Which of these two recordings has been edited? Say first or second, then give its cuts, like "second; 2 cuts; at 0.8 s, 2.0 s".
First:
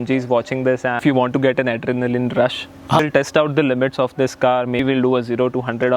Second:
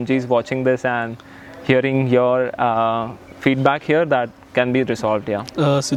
first; 3 cuts; at 1.0 s, 3.0 s, 4.8 s